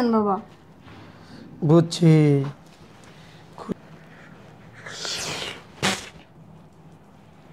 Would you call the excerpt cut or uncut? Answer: cut